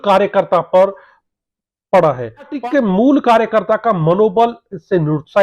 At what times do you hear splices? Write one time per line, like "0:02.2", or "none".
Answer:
0:02.5